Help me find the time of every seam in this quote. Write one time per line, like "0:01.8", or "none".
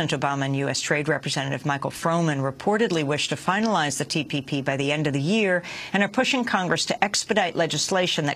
0:06.4